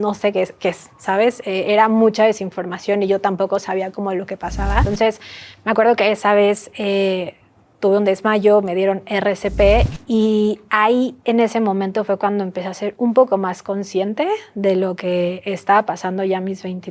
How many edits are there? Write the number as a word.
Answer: two